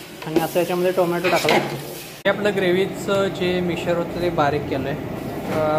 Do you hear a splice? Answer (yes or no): yes